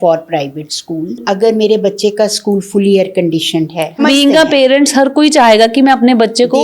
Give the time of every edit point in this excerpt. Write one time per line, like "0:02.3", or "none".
0:01.2
0:04.0